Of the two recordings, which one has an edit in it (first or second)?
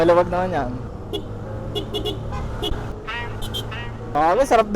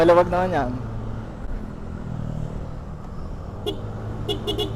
first